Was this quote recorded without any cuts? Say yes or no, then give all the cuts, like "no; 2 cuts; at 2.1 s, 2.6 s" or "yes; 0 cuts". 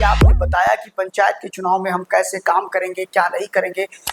yes; 0 cuts